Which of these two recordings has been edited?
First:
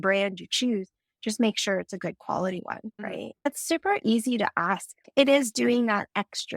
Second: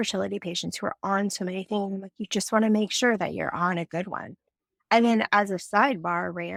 first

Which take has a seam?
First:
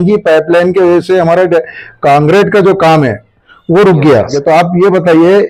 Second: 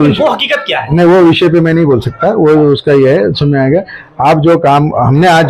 first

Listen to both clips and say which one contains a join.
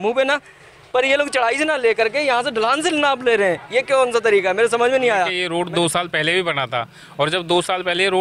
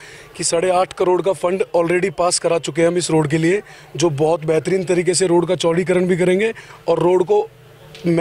first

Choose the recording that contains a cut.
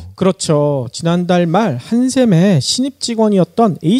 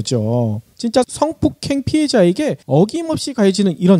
second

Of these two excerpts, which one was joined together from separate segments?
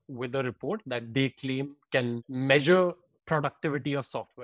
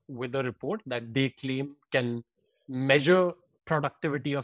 first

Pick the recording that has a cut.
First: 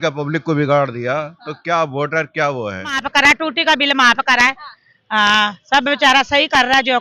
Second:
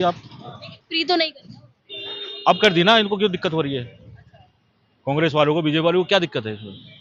first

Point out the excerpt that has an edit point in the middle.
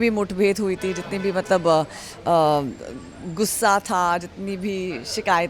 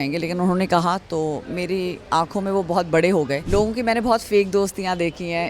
second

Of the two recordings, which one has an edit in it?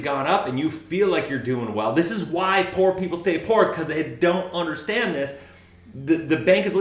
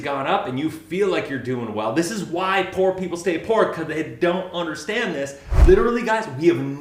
second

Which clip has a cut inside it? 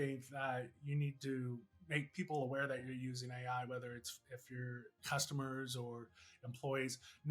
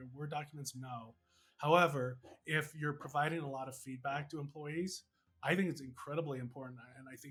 first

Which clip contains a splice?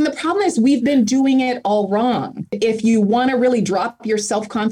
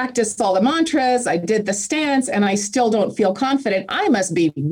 first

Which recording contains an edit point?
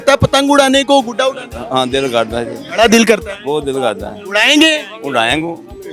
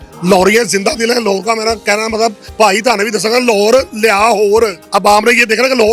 second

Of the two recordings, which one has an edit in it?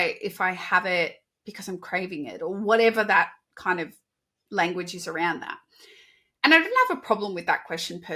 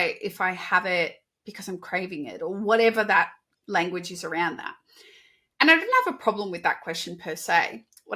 second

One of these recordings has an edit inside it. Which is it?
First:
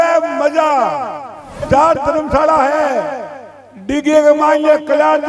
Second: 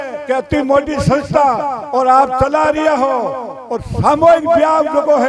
first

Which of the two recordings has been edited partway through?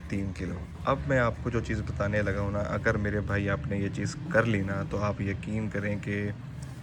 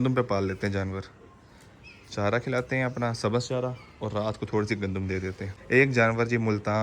second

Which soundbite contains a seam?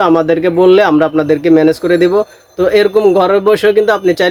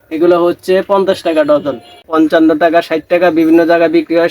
second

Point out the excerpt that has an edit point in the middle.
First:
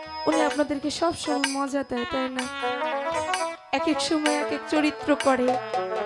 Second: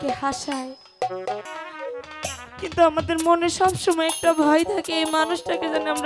second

